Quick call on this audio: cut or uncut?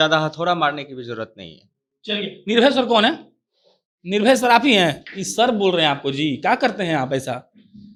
uncut